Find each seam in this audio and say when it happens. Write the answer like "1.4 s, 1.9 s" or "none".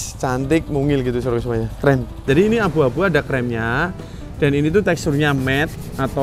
2.2 s